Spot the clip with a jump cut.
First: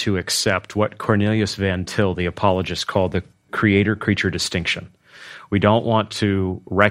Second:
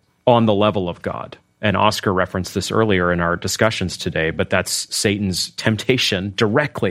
first; 1 cut; at 3.5 s

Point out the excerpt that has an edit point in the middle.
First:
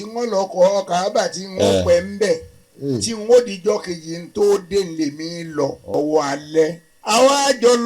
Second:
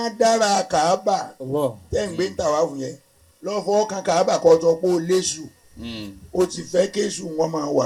first; 2 cuts; at 5.8 s, 6.9 s

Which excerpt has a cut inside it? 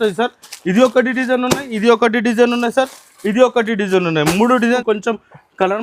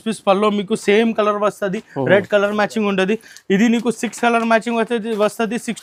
first; 1 cut; at 4.8 s

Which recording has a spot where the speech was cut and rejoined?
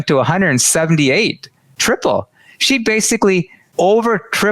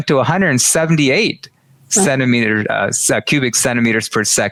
first; 2 cuts; at 1.7 s, 3.6 s

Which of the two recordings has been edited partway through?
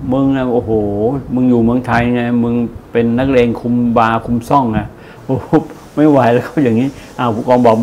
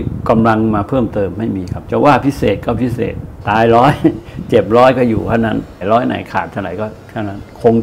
second; 3 cuts; at 1.7 s, 3.3 s, 5.8 s

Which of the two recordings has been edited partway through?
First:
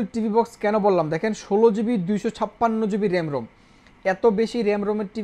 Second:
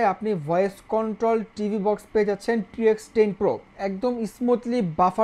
second; 1 cut; at 3.7 s

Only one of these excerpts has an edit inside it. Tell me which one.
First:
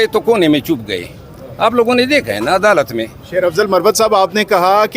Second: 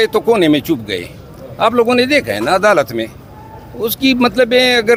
first; 1 cut; at 3.1 s

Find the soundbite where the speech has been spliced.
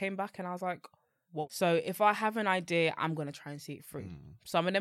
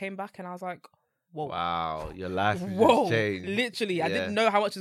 first; 1 cut; at 1.5 s

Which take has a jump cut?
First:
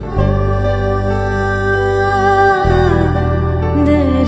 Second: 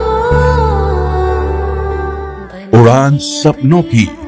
first; 1 cut; at 2.8 s

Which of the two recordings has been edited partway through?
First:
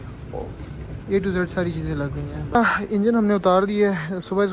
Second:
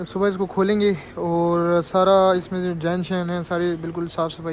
first; 1 cut; at 2.6 s

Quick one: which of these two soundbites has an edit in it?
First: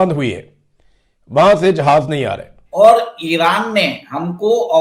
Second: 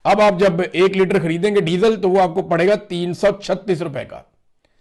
first; 1 cut; at 2.6 s

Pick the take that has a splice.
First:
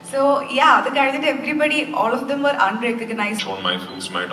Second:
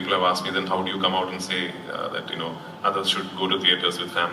first; 1 cut; at 3.4 s

